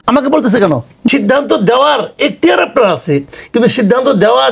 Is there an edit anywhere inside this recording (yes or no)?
yes